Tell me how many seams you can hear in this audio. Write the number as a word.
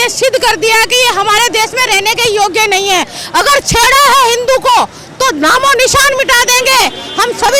zero